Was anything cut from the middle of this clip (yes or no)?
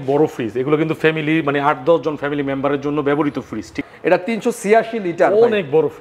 yes